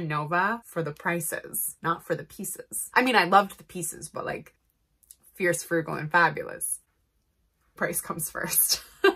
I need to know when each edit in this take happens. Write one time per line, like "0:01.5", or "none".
none